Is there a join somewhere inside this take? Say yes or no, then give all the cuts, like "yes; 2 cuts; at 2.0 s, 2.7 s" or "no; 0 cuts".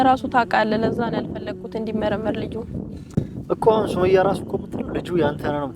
no; 0 cuts